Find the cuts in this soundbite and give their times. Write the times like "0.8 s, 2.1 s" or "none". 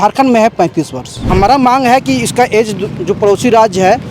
1.3 s